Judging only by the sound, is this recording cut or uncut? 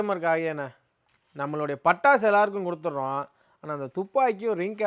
uncut